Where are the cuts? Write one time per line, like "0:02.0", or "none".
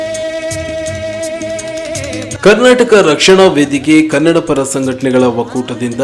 none